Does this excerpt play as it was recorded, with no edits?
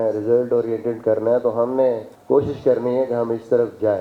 no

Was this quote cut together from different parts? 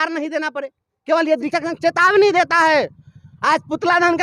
yes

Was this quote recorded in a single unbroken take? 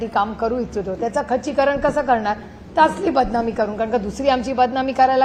yes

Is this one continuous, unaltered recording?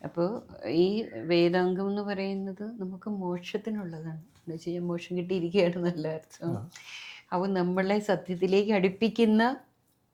yes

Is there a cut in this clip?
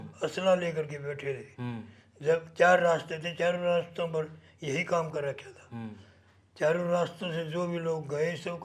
no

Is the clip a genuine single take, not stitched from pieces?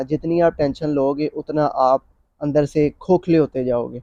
yes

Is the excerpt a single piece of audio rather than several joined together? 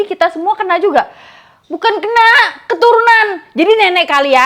yes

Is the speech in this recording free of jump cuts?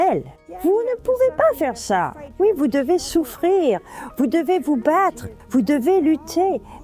no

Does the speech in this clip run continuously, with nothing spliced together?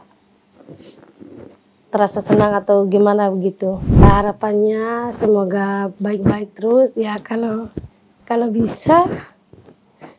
no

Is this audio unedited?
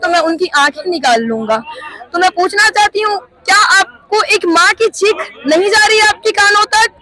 yes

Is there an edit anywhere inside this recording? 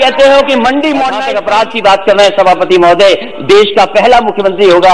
yes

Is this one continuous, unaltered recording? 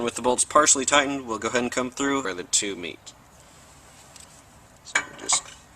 no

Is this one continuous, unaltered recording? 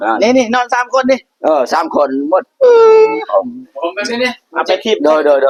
yes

